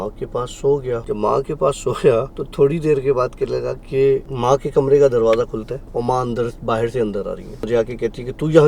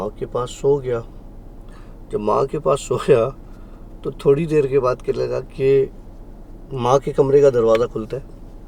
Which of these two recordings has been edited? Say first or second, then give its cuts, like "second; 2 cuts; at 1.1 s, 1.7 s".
first; 5 cuts; at 1.0 s, 2.4 s, 4.3 s, 5.8 s, 7.7 s